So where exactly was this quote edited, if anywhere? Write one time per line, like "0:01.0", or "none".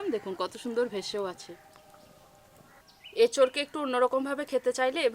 0:02.8